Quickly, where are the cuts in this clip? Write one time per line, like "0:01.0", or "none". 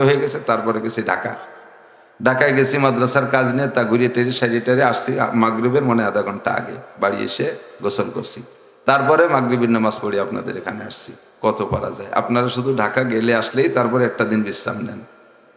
none